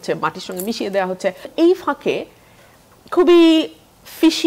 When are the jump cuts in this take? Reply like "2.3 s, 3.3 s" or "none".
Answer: 1.5 s

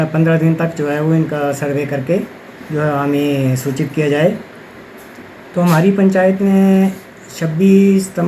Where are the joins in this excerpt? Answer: none

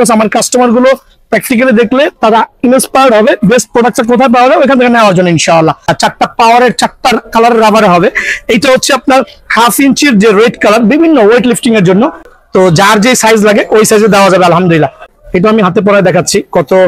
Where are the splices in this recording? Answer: 5.9 s, 12.3 s, 15.1 s

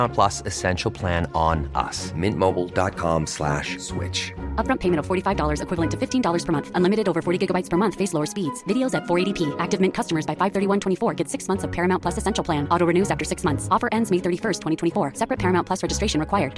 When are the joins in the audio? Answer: none

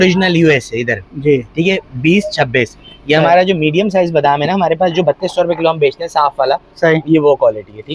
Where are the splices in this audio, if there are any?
none

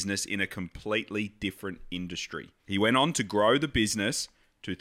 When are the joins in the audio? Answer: 2.5 s

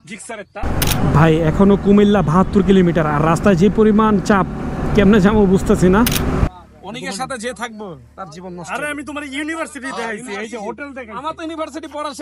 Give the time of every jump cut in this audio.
0.9 s, 6.5 s

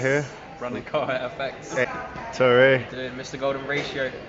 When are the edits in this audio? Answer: 1.8 s

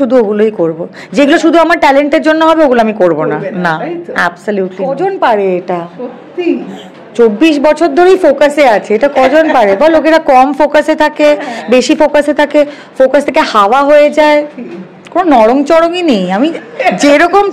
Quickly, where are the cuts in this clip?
4.8 s

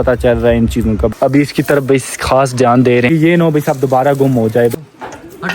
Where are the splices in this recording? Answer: 1.1 s, 3.1 s, 4.7 s

